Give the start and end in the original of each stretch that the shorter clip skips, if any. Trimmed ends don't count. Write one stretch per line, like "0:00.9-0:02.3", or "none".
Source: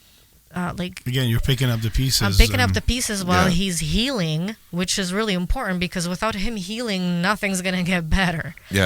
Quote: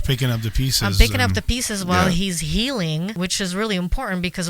0:04.5-0:04.7